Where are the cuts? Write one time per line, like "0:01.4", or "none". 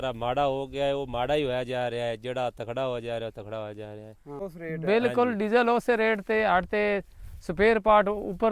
0:04.4